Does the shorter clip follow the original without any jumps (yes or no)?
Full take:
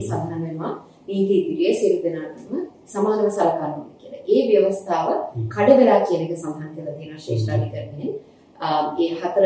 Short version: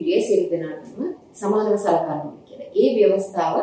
yes